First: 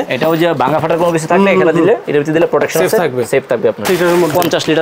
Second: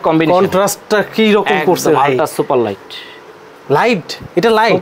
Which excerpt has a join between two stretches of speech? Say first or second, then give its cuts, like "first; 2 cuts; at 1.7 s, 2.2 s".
first; 1 cut; at 3.8 s